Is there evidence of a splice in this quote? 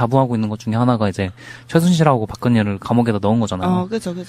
no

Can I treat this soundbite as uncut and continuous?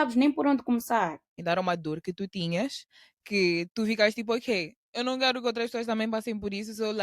no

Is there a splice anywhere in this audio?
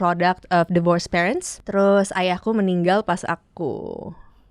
yes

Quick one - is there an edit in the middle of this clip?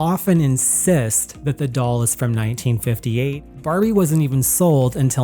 yes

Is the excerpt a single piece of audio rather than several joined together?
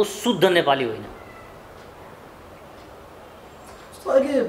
yes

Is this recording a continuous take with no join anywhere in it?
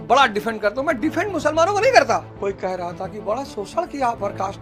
no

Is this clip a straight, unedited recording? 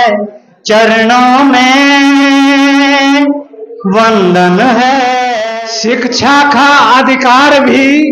no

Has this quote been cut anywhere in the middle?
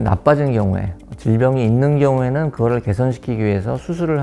no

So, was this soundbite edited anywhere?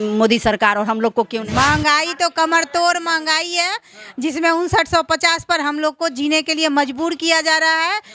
yes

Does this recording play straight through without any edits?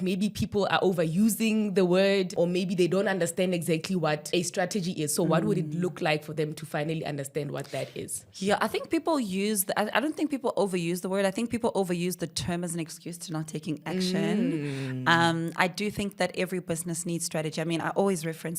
no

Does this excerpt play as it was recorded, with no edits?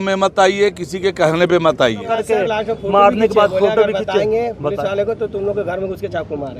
no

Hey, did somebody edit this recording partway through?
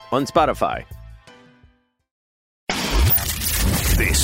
yes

